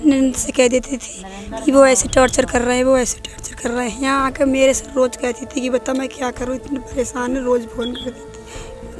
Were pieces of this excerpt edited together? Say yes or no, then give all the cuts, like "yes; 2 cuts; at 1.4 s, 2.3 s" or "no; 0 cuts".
no; 0 cuts